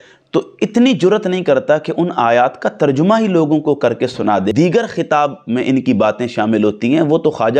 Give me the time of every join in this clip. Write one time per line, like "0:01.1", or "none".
0:04.5